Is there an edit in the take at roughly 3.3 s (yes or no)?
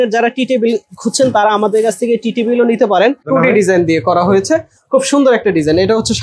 yes